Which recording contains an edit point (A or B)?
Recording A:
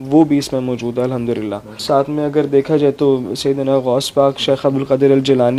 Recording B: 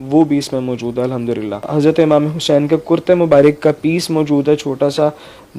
B